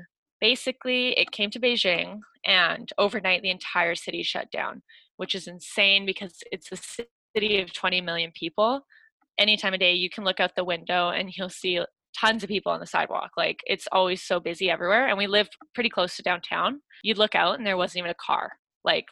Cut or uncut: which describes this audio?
cut